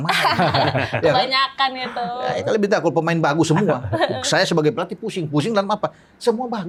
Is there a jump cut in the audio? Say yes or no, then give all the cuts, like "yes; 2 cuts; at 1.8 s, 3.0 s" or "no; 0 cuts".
no; 0 cuts